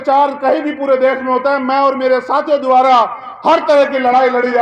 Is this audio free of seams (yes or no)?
yes